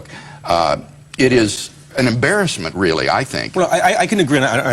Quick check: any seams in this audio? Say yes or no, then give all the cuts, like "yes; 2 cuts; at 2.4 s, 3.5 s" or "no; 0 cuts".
yes; 1 cut; at 3.4 s